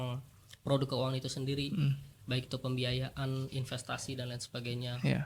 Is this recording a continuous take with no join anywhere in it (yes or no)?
yes